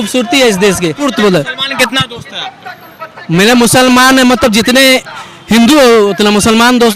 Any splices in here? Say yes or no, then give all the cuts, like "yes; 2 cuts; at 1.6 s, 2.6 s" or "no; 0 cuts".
yes; 1 cut; at 1.0 s